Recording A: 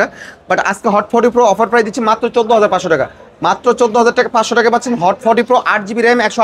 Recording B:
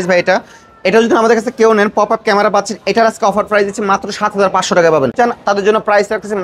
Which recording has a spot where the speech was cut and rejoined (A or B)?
B